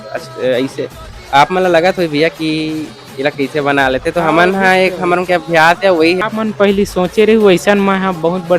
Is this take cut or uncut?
cut